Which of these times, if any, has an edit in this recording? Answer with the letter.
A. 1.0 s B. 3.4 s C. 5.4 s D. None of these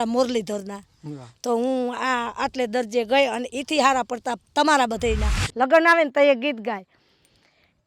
C